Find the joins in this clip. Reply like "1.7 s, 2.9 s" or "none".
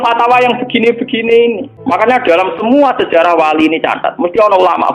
1.7 s

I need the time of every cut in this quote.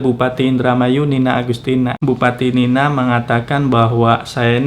2.0 s

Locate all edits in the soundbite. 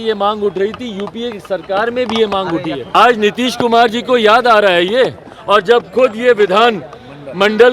2.8 s

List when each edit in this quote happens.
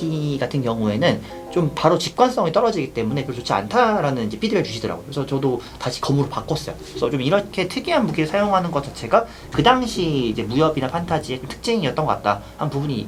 none

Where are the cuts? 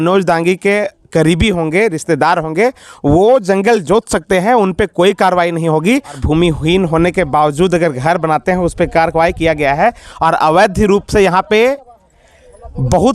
6.2 s

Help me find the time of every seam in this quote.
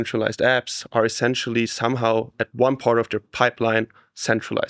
none

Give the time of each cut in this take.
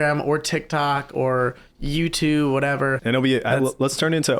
3.0 s

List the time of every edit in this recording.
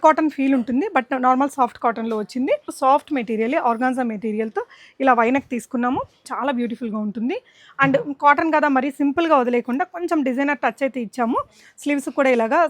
2.7 s, 6.3 s

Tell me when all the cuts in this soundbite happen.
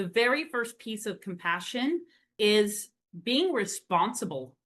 2.6 s

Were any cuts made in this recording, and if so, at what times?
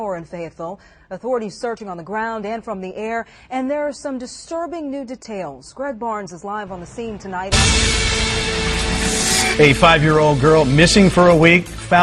7.5 s

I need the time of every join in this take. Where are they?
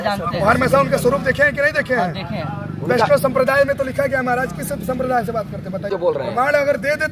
5.9 s

